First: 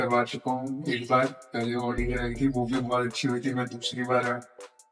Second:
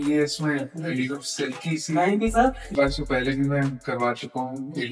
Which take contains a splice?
second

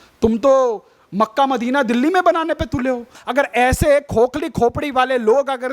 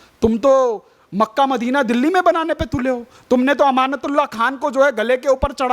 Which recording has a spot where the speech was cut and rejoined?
first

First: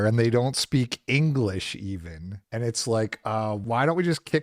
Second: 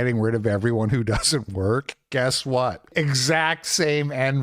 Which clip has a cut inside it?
second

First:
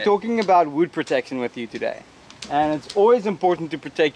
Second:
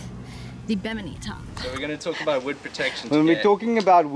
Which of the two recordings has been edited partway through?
second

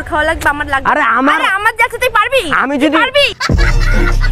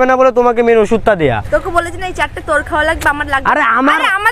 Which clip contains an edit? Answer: second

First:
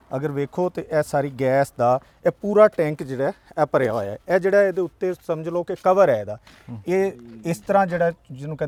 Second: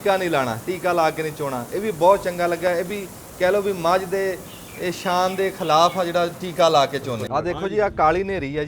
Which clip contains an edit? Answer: second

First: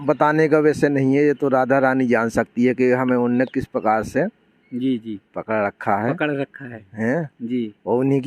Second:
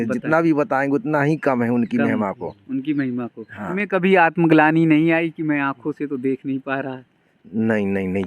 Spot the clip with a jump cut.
second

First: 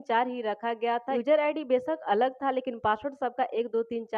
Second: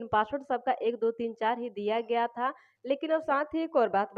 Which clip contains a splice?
second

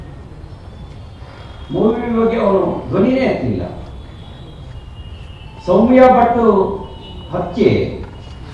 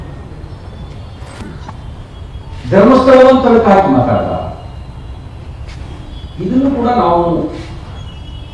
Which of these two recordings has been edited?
second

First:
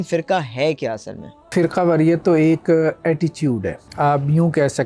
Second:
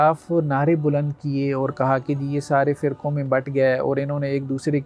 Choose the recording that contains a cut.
first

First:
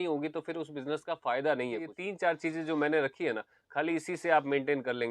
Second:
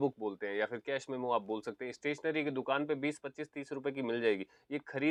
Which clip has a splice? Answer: first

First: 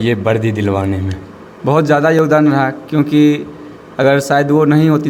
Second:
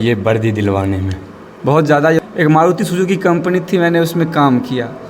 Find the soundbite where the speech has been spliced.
second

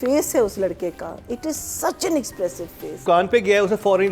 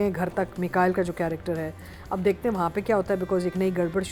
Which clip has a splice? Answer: first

